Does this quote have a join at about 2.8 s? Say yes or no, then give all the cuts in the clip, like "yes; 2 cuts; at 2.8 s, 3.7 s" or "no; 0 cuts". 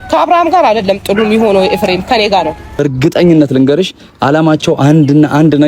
yes; 1 cut; at 2.8 s